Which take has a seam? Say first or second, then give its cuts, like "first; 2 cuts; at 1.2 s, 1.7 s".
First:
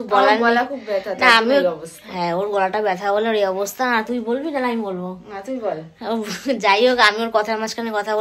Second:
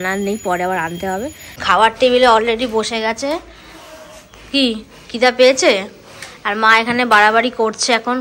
second; 1 cut; at 1.6 s